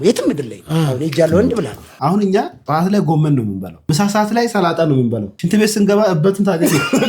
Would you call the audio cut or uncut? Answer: cut